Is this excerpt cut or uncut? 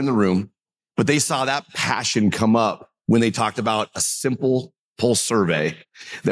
uncut